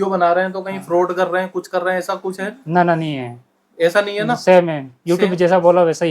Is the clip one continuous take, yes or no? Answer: yes